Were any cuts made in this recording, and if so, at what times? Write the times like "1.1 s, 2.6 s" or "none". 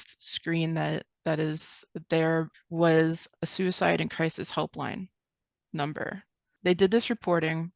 2.5 s, 6.4 s